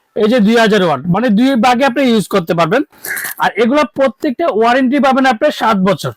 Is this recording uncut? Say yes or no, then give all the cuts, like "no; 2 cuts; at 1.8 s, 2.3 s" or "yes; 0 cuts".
yes; 0 cuts